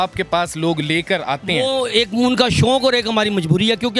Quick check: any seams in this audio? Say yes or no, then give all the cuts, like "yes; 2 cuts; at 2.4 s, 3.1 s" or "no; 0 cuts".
no; 0 cuts